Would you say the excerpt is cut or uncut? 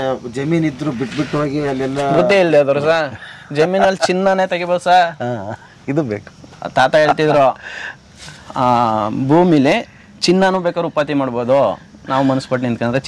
uncut